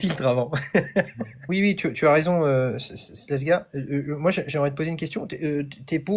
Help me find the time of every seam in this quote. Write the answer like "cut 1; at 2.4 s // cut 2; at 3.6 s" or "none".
cut 1; at 1.4 s